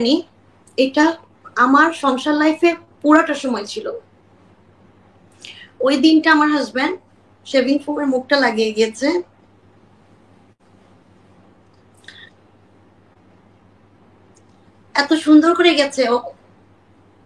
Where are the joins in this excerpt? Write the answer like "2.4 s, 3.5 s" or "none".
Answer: none

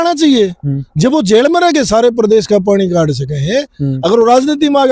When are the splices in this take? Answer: none

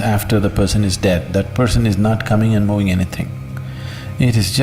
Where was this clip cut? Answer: none

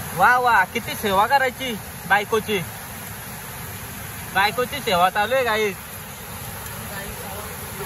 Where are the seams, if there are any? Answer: none

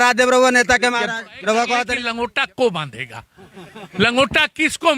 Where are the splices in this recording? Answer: 2.0 s

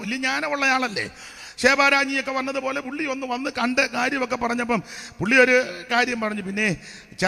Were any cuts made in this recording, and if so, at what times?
none

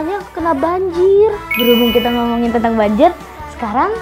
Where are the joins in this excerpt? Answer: 1.5 s

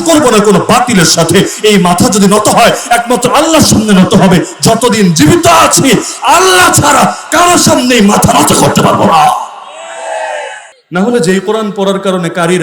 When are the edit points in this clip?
10.7 s

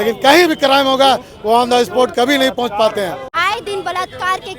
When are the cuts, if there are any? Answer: 3.2 s

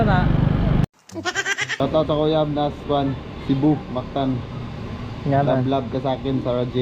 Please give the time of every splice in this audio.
1.8 s

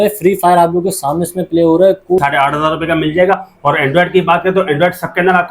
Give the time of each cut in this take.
2.2 s

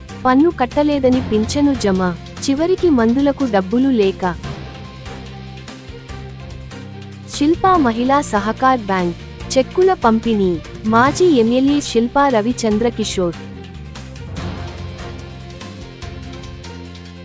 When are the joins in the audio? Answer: none

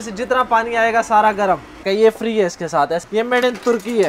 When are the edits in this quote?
1.9 s, 3.1 s

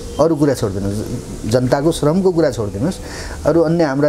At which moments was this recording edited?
none

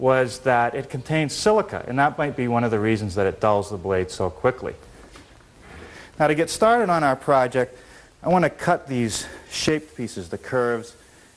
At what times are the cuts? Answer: 3.7 s

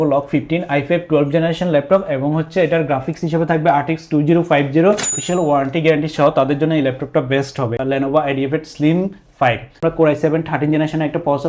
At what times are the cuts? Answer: 5.1 s, 7.8 s, 9.8 s

